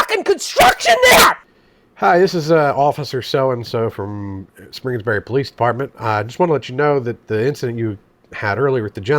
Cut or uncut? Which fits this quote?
cut